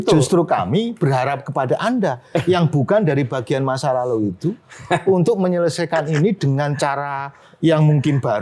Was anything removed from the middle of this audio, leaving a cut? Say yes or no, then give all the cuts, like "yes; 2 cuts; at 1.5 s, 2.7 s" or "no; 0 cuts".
no; 0 cuts